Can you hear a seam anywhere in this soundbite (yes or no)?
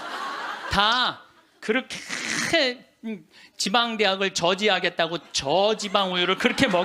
no